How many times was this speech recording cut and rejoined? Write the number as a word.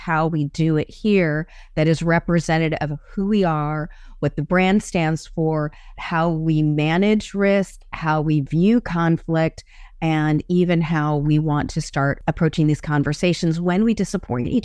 one